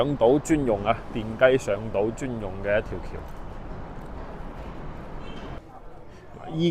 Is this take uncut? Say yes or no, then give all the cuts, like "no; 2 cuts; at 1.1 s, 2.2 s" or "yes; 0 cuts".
no; 1 cut; at 5.6 s